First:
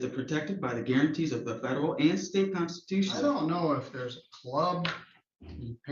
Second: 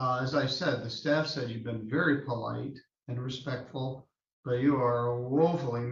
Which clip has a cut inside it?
first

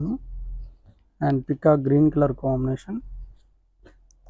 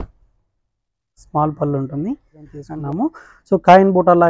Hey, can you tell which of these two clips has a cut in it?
second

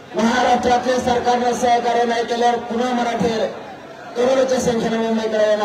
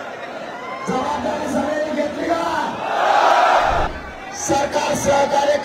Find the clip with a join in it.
second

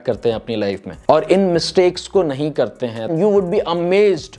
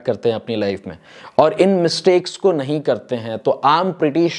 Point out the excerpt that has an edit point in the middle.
first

